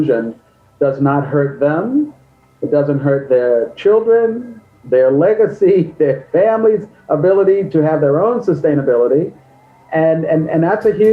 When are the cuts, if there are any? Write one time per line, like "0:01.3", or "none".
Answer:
none